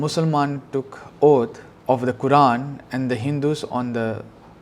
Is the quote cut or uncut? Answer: cut